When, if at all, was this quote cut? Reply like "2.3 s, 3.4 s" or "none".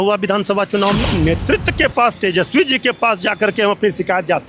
1.1 s